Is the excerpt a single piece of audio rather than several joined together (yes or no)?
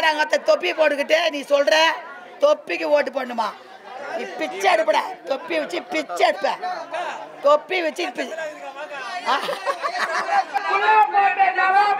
yes